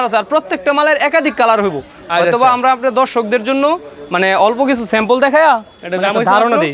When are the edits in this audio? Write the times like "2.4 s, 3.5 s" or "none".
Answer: none